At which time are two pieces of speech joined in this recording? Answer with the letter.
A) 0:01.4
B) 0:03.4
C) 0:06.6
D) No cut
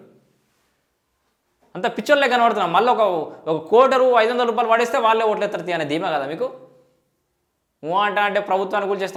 D